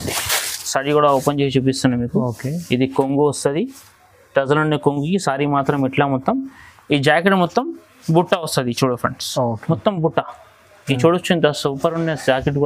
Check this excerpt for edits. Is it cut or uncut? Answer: uncut